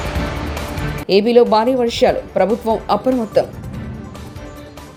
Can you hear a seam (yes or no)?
no